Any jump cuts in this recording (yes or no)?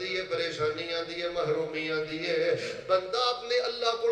no